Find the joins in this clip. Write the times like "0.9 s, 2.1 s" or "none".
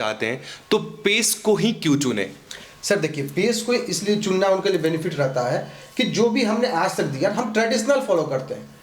none